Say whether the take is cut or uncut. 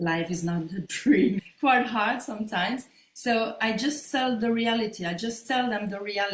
cut